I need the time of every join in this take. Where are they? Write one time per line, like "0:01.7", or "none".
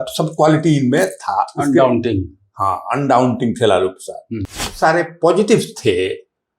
0:04.7

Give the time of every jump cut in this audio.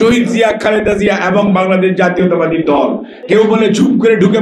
0:03.1

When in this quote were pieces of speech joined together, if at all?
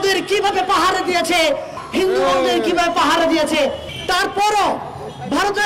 0:01.8
0:03.9

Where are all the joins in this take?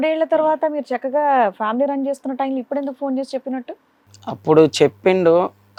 none

